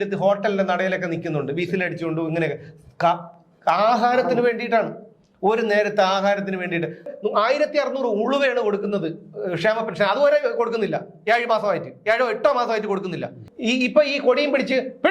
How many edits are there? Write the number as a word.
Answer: two